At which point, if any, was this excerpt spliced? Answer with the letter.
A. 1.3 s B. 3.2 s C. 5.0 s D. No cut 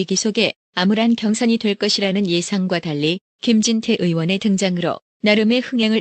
B